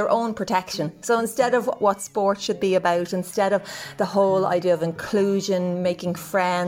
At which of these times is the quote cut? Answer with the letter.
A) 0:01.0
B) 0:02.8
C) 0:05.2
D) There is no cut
A